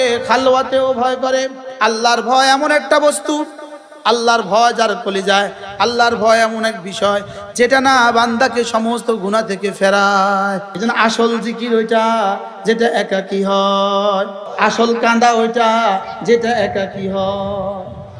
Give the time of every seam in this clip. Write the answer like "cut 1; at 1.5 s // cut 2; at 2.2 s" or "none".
cut 1; at 1.6 s // cut 2; at 10.7 s // cut 3; at 14.4 s